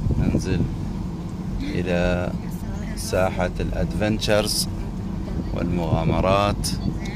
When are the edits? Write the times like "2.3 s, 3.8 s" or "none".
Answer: none